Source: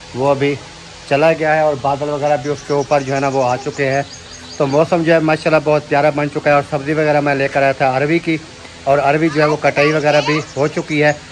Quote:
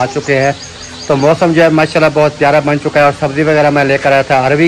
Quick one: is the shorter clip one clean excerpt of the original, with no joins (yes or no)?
yes